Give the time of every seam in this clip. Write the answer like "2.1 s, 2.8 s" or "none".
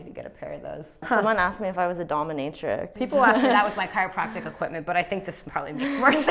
1.1 s, 2.9 s